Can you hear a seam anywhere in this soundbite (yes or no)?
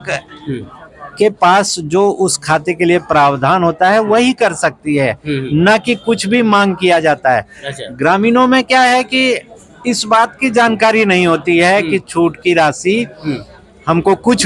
no